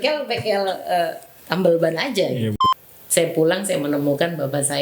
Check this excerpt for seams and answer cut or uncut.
cut